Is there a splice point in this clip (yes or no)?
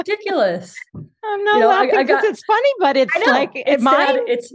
no